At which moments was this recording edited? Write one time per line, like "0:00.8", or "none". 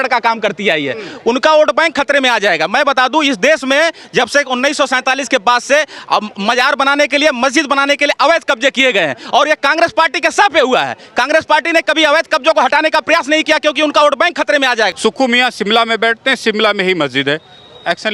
0:14.9